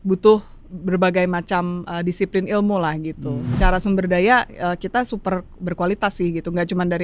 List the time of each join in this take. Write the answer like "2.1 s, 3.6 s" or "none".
3.5 s